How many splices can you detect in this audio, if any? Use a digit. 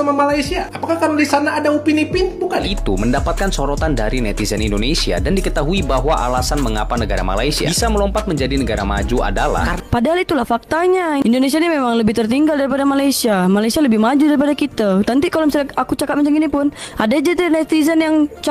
2